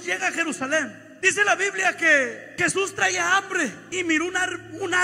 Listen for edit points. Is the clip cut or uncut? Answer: cut